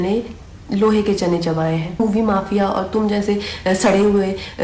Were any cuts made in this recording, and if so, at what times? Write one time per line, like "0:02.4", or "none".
0:02.0

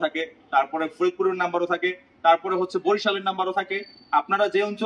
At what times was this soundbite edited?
none

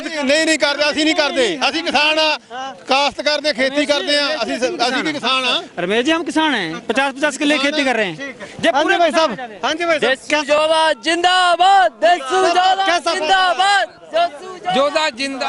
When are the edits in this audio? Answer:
none

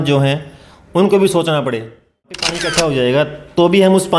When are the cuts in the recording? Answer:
0:02.5

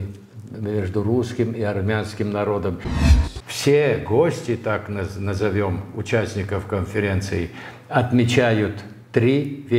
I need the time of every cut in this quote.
0:03.0

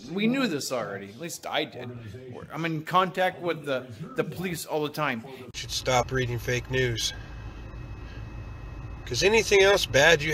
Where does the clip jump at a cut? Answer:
0:05.4

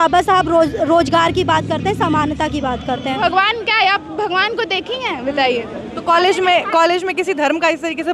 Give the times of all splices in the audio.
0:03.2

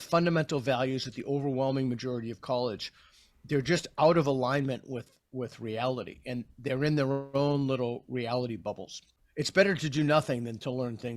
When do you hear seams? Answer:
0:09.2

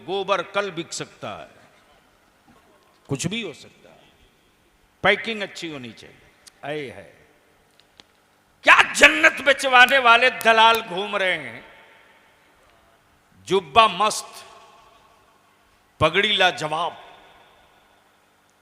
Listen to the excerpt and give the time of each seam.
0:02.7

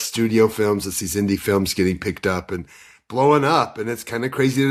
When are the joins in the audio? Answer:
none

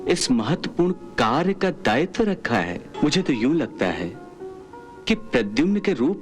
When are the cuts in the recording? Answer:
0:02.9

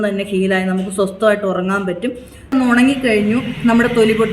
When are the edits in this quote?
0:02.5

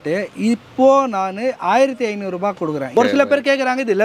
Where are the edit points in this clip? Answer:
0:02.9

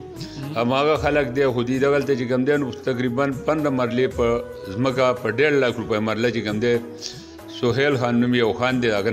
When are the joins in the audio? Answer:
none

